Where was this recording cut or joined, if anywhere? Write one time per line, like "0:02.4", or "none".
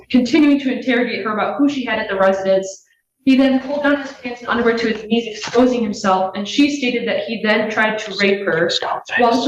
none